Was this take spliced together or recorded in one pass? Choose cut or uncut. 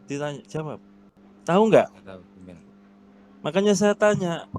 cut